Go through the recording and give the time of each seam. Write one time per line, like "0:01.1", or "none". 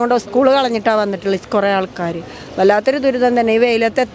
none